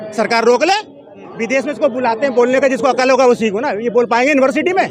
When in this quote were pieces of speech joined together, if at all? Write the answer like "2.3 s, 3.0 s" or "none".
1.3 s